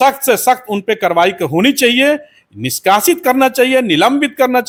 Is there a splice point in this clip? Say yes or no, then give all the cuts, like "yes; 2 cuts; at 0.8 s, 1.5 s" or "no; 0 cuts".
no; 0 cuts